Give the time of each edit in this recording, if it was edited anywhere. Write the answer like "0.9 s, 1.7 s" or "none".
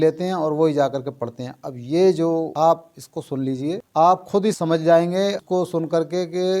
2.5 s, 3.8 s, 4.6 s, 5.4 s